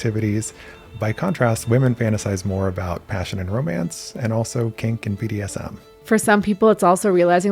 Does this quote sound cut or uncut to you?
cut